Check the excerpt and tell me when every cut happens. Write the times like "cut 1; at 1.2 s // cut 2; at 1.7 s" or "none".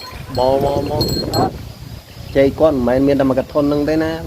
cut 1; at 1.3 s

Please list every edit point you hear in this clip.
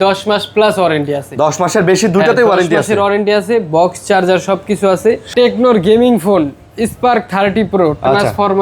cut 1; at 5.2 s

